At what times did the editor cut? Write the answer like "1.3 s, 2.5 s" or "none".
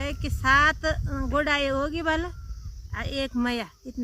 none